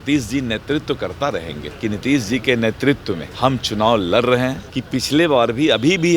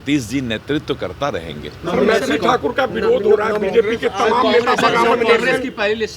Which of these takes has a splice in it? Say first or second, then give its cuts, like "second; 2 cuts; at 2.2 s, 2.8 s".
first; 3 cuts; at 1.6 s, 3.2 s, 4.7 s